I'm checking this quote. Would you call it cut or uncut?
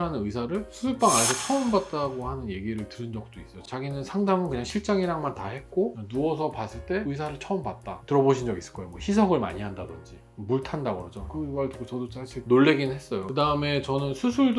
cut